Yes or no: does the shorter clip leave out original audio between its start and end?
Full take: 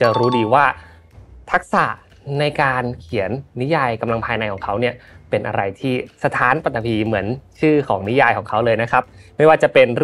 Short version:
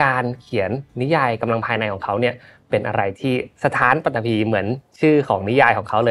no